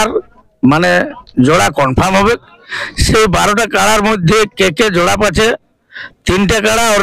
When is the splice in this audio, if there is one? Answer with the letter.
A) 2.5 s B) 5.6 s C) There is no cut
C